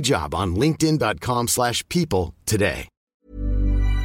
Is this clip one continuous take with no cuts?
no; 1 cut; at 3.1 s

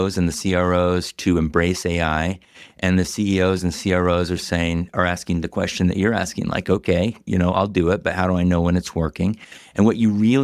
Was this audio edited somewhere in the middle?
no; 0 cuts

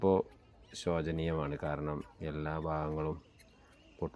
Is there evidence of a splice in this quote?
no; 0 cuts

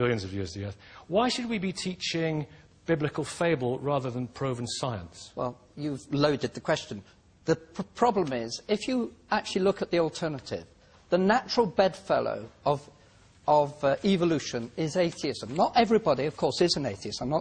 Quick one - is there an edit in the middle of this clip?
yes; 1 cut; at 4.7 s

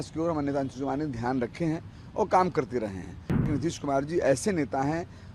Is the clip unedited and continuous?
no; 1 cut; at 3.5 s

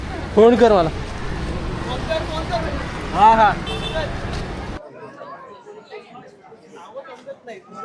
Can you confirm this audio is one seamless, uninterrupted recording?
no; 1 cut; at 4.8 s

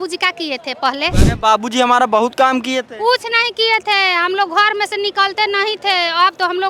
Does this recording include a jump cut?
yes; 1 cut; at 1.2 s

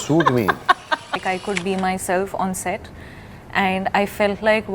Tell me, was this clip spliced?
yes; 1 cut; at 1.2 s

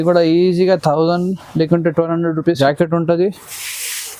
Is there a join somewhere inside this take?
yes; 1 cut; at 2.6 s

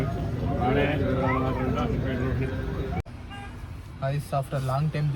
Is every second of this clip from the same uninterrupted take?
yes; 0 cuts

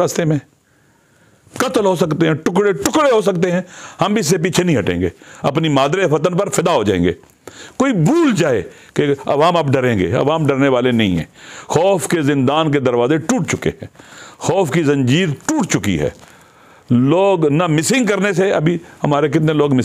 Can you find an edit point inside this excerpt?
no; 0 cuts

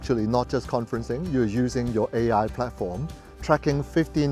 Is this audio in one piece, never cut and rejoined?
yes; 0 cuts

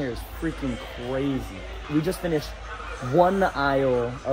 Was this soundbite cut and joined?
no; 0 cuts

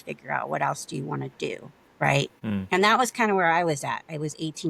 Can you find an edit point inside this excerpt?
yes; 1 cut; at 2.4 s

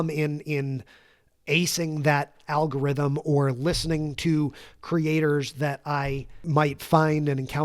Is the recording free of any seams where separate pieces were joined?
no; 1 cut; at 6.3 s

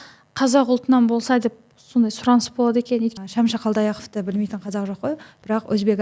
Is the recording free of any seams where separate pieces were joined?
no; 1 cut; at 3.1 s

